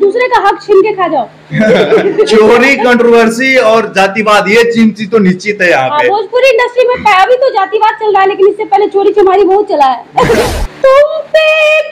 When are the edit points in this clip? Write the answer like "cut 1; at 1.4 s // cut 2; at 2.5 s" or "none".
cut 1; at 10.4 s